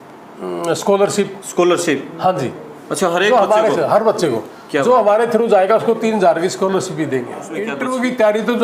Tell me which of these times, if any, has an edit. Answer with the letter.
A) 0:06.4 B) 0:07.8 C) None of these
B